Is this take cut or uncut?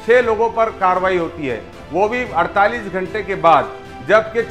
uncut